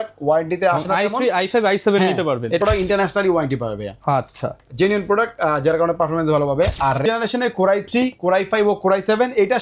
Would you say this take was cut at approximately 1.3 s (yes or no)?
no